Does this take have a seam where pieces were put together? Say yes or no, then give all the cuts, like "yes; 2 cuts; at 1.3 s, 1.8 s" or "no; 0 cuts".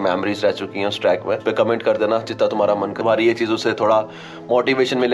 yes; 2 cuts; at 1.4 s, 3.0 s